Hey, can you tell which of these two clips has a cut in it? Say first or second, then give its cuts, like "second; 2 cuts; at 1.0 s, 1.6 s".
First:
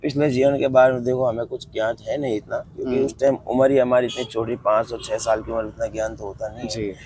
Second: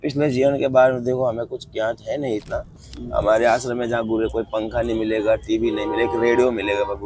second; 1 cut; at 2.7 s